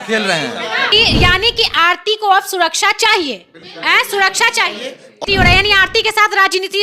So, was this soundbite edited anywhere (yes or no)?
yes